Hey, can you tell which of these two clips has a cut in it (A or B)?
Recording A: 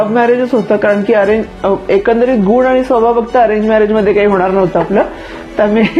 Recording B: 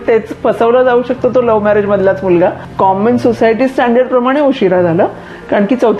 B